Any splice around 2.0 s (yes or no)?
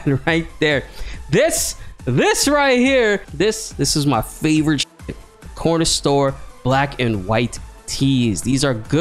no